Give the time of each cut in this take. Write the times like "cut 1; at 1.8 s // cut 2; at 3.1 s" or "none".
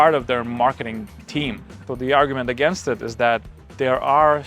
cut 1; at 1.9 s